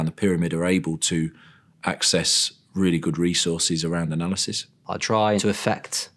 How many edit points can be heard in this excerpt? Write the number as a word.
one